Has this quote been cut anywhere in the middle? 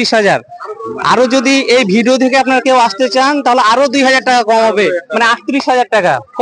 no; 0 cuts

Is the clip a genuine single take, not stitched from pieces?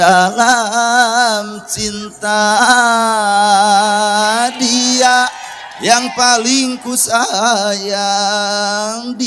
yes; 0 cuts

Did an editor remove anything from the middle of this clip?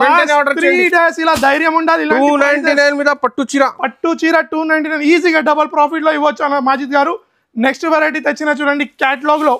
no; 0 cuts

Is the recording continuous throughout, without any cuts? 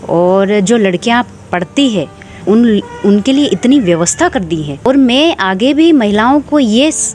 no; 2 cuts; at 2.4 s, 4.9 s

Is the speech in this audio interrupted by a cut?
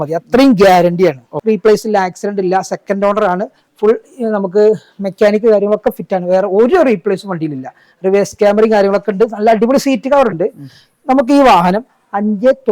yes; 1 cut; at 1.3 s

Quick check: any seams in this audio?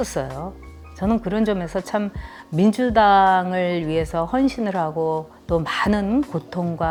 no; 0 cuts

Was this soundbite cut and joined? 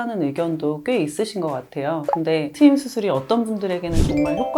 yes; 1 cut; at 2.4 s

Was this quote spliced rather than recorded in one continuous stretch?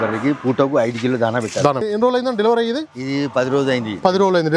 yes; 1 cut; at 1.9 s

